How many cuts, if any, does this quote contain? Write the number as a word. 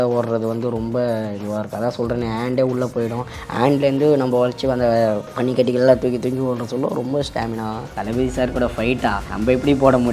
three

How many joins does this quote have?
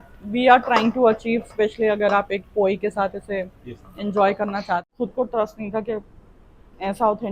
one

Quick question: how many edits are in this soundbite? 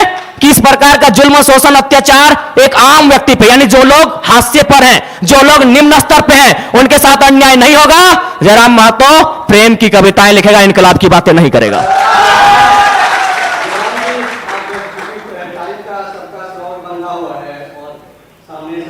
zero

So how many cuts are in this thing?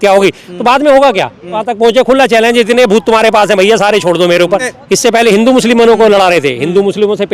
two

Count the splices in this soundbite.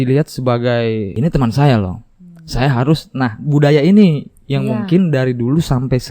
one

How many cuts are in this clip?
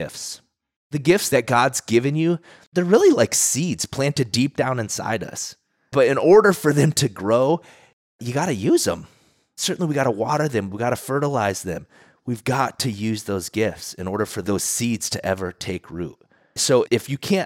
two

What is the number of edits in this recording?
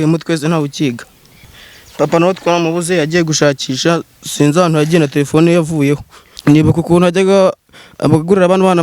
two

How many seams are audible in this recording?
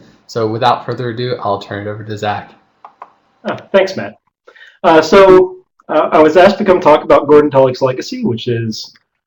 one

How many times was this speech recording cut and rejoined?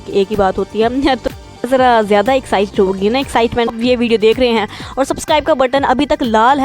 one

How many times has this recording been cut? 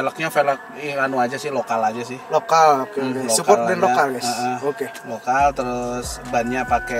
zero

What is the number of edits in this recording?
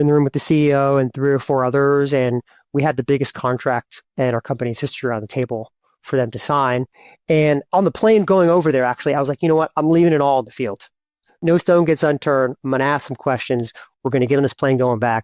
two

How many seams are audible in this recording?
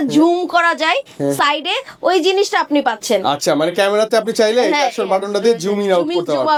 zero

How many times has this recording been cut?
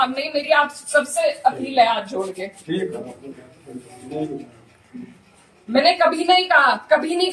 zero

